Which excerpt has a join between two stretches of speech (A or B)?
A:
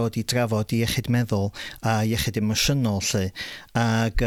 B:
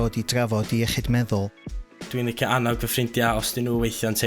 B